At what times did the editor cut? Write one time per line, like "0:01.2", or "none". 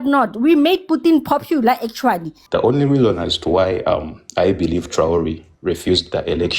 0:02.3